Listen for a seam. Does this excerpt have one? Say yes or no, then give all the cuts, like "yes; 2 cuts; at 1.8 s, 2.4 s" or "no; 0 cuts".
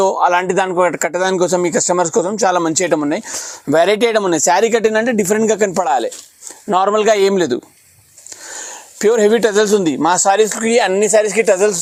no; 0 cuts